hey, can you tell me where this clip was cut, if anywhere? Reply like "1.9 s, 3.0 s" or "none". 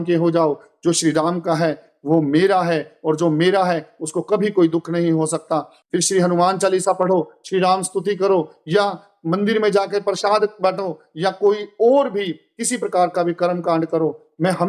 none

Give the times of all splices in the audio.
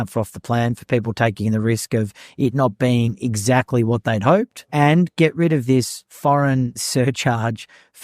4.6 s, 6.8 s

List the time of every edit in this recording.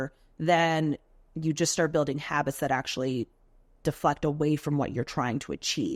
none

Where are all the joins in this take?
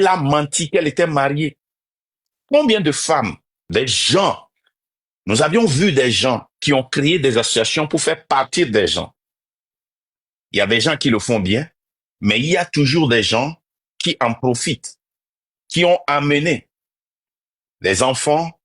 3.7 s

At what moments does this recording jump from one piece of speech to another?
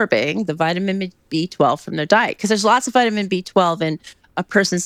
none

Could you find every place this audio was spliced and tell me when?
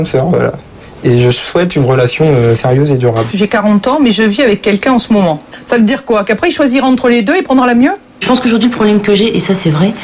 3.2 s, 5.4 s, 8.2 s

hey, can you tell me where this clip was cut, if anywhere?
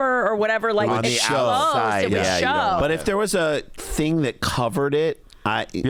none

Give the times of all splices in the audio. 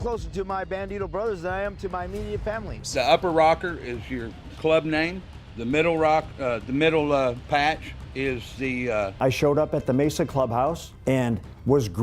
2.8 s, 9.1 s

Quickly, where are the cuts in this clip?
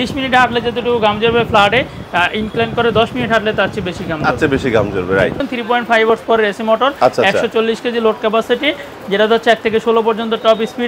5.4 s

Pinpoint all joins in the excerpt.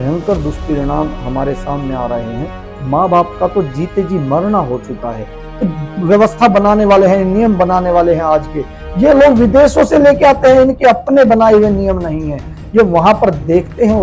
none

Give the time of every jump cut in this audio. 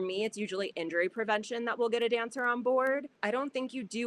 3.1 s

